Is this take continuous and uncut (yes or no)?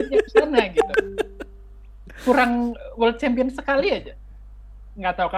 yes